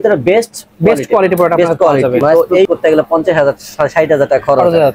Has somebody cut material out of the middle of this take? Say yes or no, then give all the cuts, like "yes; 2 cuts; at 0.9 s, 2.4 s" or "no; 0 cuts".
yes; 1 cut; at 2.7 s